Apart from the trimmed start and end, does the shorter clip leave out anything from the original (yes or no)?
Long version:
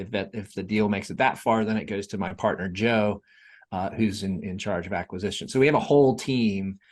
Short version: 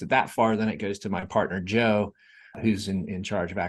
yes